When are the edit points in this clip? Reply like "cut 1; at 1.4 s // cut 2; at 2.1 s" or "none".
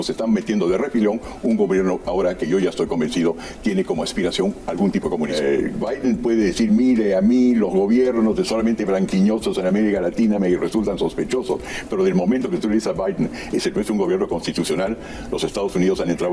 cut 1; at 5.3 s